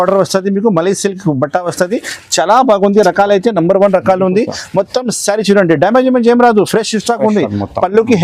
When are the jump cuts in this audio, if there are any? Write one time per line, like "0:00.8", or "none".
none